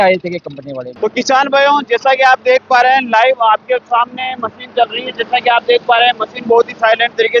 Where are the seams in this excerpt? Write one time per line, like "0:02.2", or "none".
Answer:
0:00.9